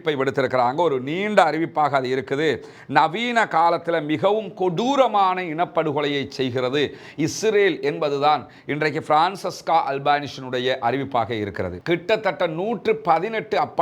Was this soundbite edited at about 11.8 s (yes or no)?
yes